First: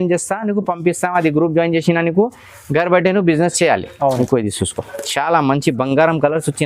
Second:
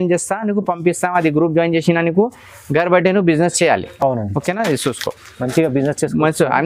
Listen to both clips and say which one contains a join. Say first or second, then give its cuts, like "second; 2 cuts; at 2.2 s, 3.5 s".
first; 1 cut; at 4.0 s